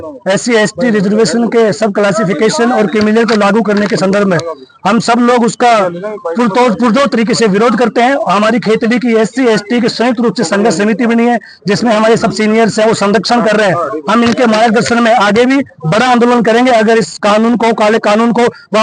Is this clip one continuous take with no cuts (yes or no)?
yes